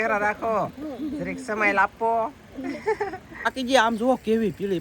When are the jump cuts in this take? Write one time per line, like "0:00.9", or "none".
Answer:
0:03.5